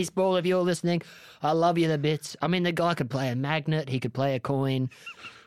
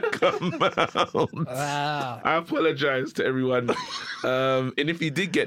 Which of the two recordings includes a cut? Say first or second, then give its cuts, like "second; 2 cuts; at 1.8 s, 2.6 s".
second; 1 cut; at 2.1 s